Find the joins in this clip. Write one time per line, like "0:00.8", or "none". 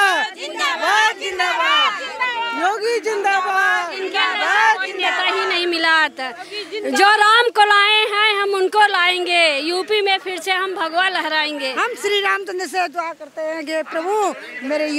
none